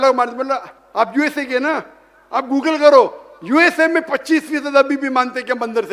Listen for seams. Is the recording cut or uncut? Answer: uncut